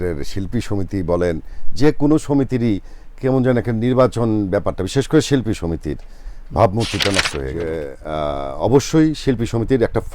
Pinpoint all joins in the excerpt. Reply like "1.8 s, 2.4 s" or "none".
7.6 s